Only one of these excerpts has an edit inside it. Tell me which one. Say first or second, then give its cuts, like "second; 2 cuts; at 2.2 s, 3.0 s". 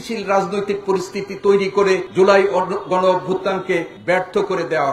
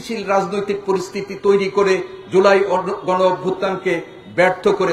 first; 2 cuts; at 2.1 s, 3.9 s